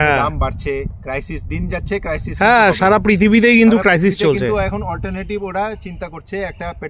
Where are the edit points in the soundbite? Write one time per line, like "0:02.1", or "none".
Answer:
none

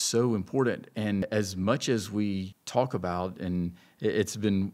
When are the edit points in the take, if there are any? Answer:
0:01.3
0:02.6

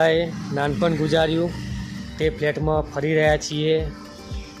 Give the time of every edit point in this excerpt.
none

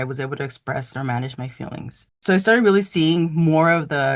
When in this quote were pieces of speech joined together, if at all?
0:00.9
0:02.1

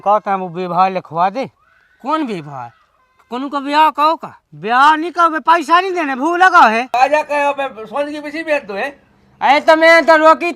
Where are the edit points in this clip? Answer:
0:06.9

